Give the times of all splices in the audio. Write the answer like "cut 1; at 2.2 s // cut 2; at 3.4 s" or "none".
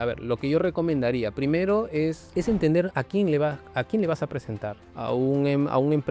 cut 1; at 2.2 s // cut 2; at 4.8 s